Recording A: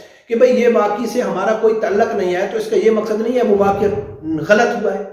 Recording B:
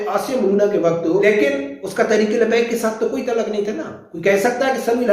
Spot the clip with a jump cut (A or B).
B